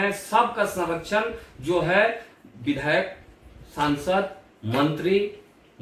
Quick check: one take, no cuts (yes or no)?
yes